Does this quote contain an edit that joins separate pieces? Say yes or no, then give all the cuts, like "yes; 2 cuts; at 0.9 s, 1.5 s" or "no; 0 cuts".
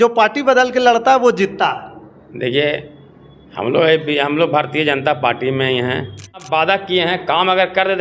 yes; 1 cut; at 6.4 s